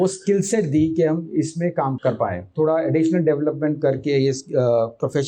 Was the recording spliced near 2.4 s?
yes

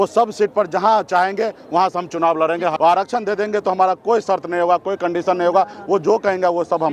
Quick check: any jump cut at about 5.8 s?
no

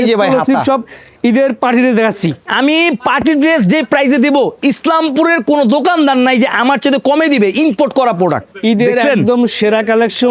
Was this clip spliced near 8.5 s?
yes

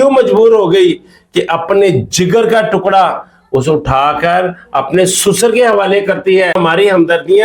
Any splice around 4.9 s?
no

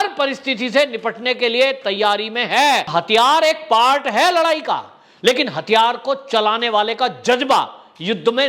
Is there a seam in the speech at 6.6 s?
no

